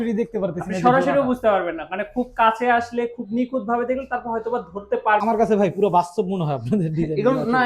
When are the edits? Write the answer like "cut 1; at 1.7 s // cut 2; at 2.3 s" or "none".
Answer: cut 1; at 5.2 s